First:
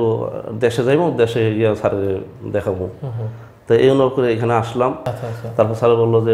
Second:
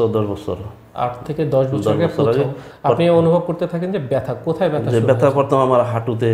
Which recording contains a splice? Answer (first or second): first